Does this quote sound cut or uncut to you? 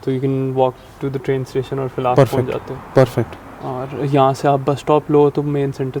uncut